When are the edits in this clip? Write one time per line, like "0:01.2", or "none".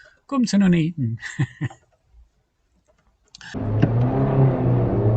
0:03.6